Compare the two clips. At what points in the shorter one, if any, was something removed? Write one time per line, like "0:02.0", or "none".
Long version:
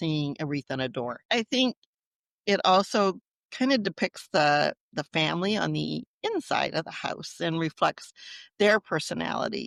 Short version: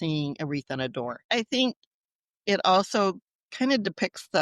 none